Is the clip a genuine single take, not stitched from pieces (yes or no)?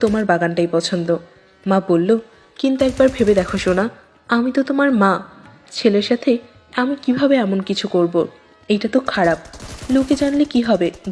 yes